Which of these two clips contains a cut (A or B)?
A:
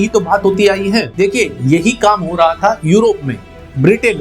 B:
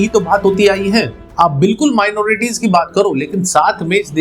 A